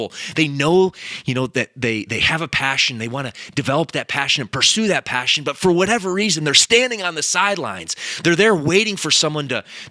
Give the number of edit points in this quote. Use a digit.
0